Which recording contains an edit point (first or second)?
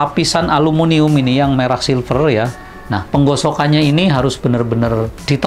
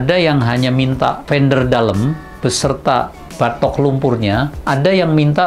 first